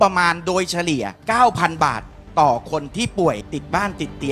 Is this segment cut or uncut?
cut